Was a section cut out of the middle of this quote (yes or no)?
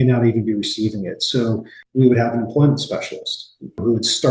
yes